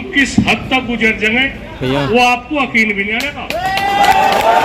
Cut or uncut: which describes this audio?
uncut